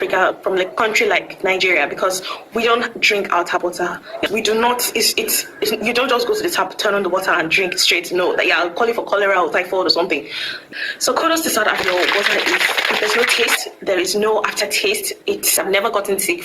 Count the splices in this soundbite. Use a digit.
3